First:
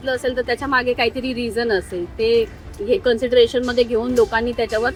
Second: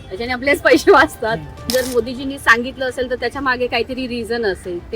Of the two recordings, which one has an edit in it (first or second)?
second